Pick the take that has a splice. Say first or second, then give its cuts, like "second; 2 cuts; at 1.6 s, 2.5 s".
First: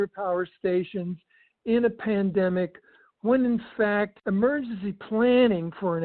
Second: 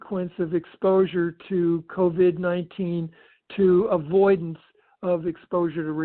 first; 1 cut; at 4.2 s